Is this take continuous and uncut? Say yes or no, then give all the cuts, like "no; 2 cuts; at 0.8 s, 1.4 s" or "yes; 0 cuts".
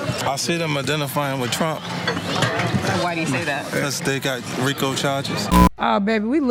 no; 1 cut; at 5.5 s